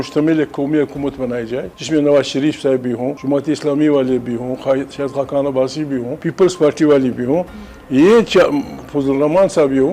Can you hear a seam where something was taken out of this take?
yes; 3 cuts; at 1.7 s, 3.1 s, 6.2 s

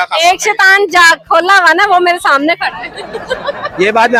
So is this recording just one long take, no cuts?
yes; 0 cuts

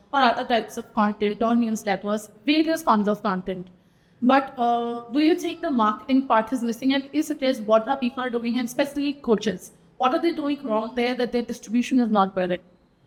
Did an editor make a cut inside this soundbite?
no; 0 cuts

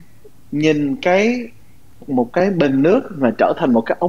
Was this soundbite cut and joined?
yes; 1 cut; at 2.0 s

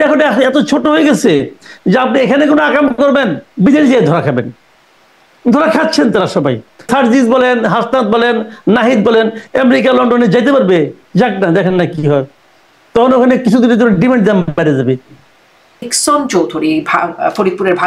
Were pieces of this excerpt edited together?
yes; 2 cuts; at 6.9 s, 15.9 s

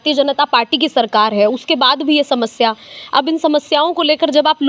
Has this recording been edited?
no; 0 cuts

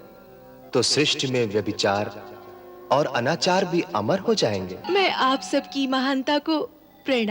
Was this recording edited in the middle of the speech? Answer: yes; 1 cut; at 4.8 s

